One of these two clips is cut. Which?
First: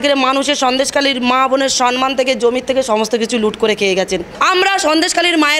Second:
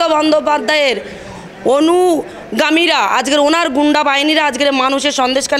first; 1 cut; at 4.3 s

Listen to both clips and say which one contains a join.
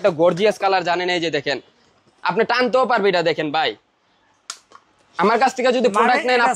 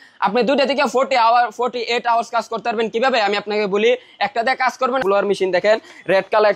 second; 1 cut; at 5.0 s

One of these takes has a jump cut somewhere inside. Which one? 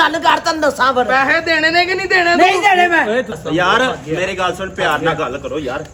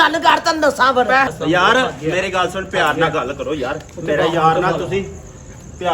second; 1 cut; at 1.3 s

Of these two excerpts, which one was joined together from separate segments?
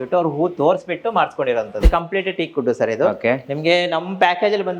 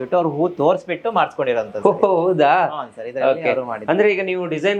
first; 1 cut; at 1.8 s

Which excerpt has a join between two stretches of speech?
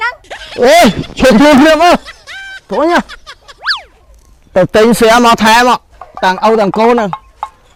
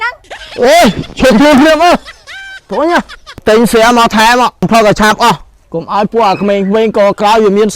second; 2 cuts; at 3.4 s, 4.7 s

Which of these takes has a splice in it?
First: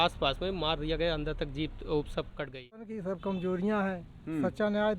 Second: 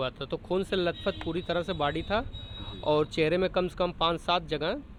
first; 1 cut; at 2.9 s

